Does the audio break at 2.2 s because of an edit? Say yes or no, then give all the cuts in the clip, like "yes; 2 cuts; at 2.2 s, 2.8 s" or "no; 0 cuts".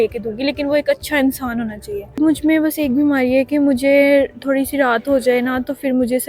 yes; 1 cut; at 2.2 s